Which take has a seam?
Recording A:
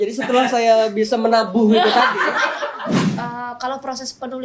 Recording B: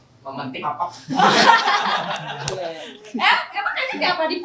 A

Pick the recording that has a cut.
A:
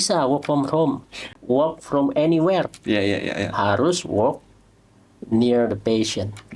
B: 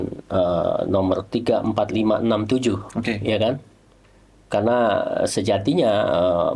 A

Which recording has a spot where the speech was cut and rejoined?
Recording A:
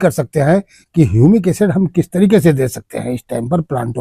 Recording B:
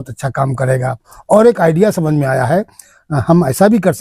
B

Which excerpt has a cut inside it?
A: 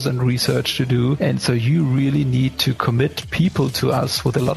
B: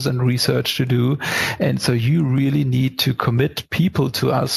A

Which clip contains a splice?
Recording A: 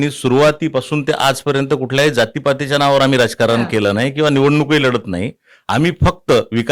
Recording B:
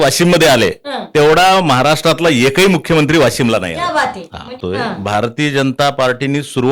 B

